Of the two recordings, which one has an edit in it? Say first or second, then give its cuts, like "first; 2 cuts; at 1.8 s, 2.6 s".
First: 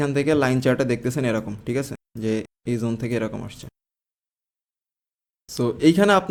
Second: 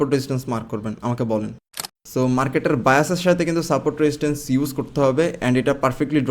second; 1 cut; at 1.8 s